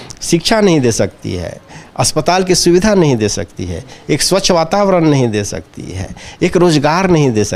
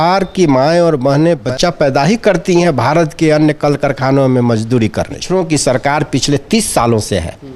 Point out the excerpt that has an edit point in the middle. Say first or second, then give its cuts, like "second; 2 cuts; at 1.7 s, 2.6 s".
second; 2 cuts; at 1.4 s, 5.2 s